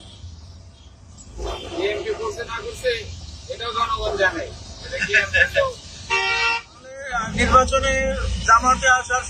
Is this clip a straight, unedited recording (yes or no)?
no